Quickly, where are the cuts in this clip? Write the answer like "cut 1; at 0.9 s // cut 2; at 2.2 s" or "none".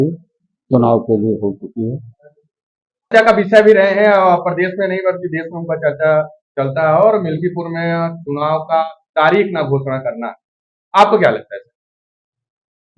cut 1; at 3.1 s